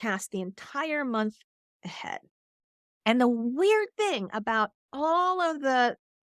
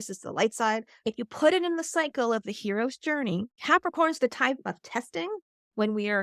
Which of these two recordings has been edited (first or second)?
second